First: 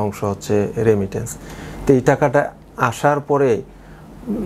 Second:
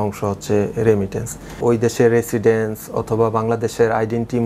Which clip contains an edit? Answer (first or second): second